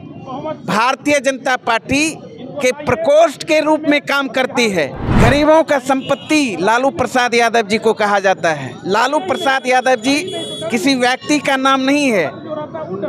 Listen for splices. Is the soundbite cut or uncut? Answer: cut